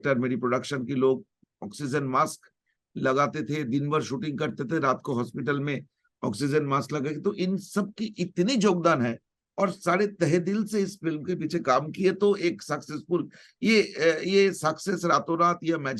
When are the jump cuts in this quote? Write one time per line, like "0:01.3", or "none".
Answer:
none